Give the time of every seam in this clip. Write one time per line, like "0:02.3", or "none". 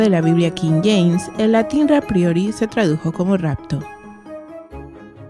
0:01.7